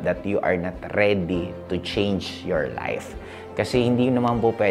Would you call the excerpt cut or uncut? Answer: uncut